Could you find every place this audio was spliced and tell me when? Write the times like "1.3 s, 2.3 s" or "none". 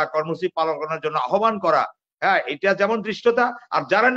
none